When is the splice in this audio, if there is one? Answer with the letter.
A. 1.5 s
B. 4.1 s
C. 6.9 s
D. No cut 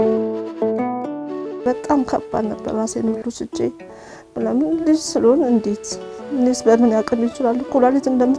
A